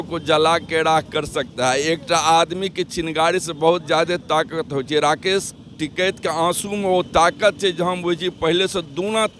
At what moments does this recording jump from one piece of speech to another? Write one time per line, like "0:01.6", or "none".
none